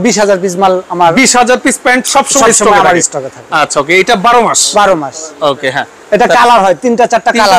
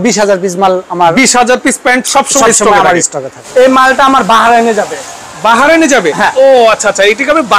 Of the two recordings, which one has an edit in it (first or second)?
second